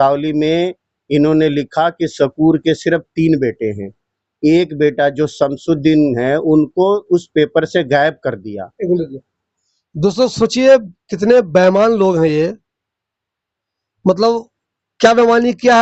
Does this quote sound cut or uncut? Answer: uncut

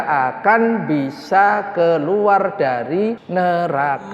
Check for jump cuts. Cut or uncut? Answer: cut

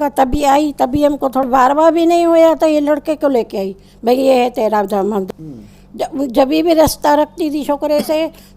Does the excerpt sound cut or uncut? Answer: cut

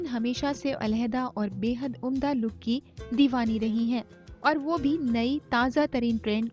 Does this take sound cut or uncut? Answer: uncut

